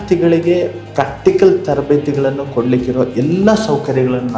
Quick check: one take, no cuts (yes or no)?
yes